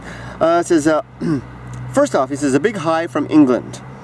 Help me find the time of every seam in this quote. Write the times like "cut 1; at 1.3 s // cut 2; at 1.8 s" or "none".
none